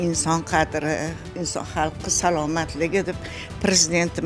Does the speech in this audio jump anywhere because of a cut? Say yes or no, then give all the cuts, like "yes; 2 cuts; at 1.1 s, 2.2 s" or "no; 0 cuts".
yes; 1 cut; at 1.2 s